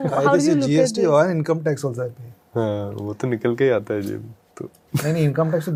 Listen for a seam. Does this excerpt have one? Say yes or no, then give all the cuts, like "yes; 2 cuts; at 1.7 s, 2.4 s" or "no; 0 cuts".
no; 0 cuts